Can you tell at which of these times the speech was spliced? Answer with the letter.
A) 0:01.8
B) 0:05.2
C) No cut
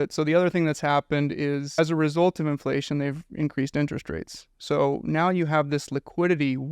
A